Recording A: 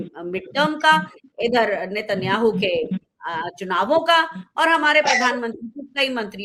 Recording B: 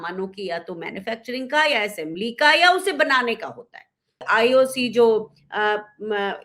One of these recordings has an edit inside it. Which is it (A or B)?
B